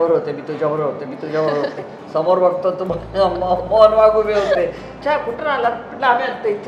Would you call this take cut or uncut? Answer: cut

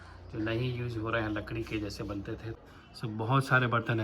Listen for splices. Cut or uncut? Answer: cut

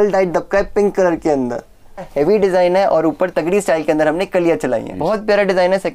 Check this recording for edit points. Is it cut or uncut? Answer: cut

